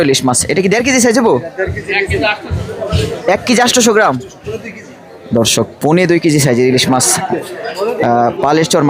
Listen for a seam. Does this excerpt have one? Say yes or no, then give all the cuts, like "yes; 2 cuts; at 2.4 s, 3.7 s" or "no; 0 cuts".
no; 0 cuts